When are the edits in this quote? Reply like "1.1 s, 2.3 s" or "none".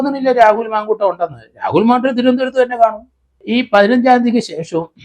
3.4 s